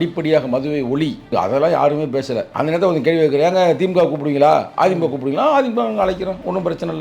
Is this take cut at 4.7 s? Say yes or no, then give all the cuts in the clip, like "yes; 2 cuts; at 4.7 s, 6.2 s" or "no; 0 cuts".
no; 2 cuts; at 1.2 s, 2.4 s